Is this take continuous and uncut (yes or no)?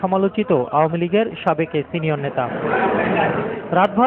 yes